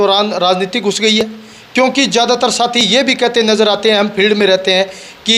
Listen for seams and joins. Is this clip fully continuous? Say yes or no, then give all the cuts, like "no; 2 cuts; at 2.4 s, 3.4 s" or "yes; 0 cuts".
yes; 0 cuts